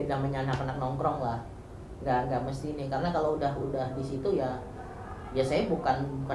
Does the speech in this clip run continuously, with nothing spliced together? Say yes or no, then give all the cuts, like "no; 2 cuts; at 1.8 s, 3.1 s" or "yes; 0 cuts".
yes; 0 cuts